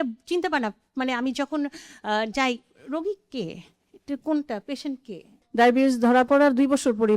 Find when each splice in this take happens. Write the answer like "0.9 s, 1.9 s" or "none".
5.4 s